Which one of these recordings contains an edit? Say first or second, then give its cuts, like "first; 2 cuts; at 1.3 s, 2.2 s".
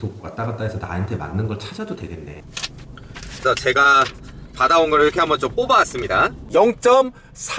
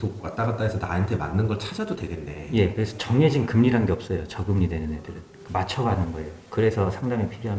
first; 2 cuts; at 2.3 s, 6.4 s